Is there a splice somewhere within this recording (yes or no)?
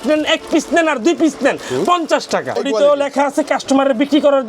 yes